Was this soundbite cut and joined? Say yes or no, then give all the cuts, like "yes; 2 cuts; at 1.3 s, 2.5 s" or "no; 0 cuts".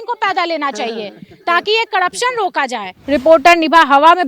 yes; 1 cut; at 3.0 s